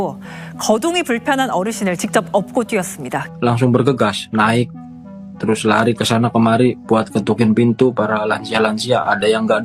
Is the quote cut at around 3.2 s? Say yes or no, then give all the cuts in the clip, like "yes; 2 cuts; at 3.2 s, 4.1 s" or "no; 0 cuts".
yes; 1 cut; at 3.2 s